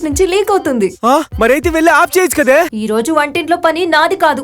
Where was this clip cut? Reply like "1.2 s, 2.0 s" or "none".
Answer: 1.3 s, 2.7 s